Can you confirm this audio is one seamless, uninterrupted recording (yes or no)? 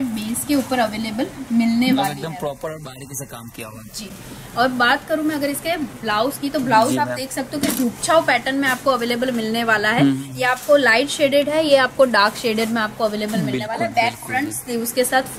yes